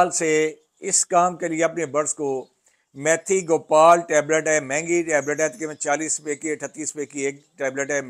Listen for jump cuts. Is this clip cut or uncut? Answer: uncut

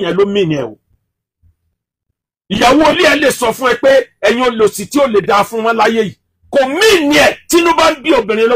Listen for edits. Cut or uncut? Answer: uncut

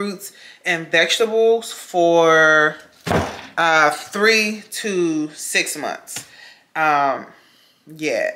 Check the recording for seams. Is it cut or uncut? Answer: uncut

